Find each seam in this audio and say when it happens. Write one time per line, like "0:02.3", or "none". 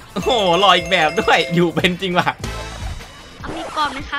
0:03.3